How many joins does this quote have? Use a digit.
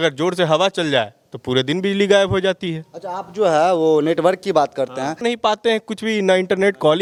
0